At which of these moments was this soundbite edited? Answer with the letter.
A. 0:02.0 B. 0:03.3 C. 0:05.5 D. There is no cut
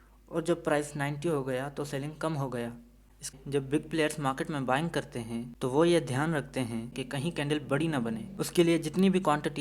B